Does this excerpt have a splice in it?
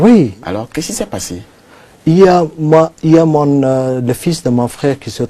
no; 0 cuts

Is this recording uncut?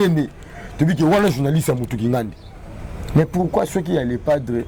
yes; 0 cuts

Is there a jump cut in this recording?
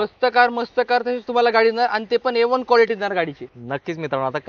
no; 0 cuts

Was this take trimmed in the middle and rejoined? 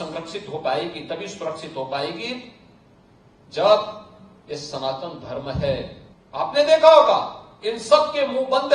yes; 1 cut; at 6.0 s

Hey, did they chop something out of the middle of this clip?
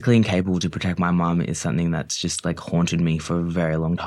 no; 0 cuts

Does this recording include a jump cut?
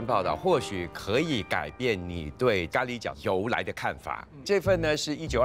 no; 0 cuts

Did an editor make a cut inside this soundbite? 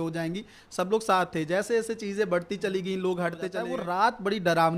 yes; 1 cut; at 3.6 s

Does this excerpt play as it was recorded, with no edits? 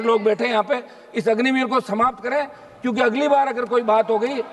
yes; 0 cuts

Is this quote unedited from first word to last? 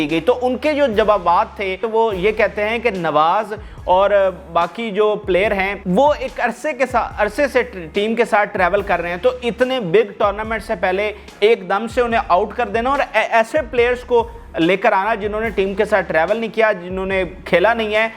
no; 2 cuts; at 1.8 s, 5.8 s

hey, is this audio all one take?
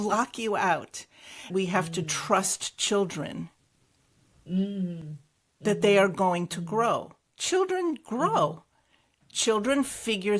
no; 1 cut; at 1.5 s

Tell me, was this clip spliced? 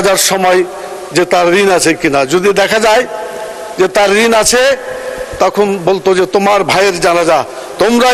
no; 0 cuts

